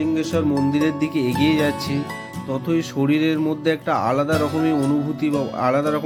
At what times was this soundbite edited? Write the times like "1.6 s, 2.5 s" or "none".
none